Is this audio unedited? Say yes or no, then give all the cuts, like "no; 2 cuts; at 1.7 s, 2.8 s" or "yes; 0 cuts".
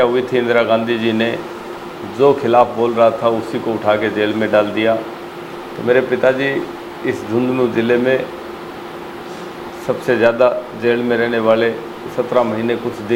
yes; 0 cuts